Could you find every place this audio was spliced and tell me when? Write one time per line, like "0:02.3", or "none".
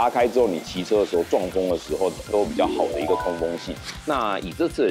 0:02.3
0:03.9